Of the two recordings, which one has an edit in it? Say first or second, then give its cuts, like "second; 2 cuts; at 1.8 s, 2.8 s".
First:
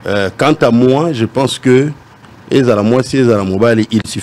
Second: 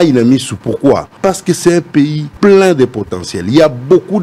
second; 2 cuts; at 1.1 s, 2.2 s